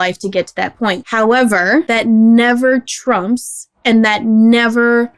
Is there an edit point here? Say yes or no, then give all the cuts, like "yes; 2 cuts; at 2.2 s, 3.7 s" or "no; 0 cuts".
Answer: yes; 2 cuts; at 1.0 s, 1.9 s